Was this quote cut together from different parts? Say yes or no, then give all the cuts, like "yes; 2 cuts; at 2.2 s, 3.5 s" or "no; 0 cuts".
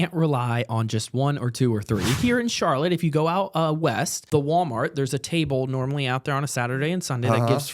yes; 2 cuts; at 2.2 s, 4.2 s